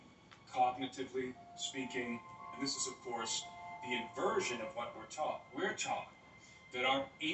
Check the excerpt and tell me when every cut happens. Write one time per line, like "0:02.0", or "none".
0:02.6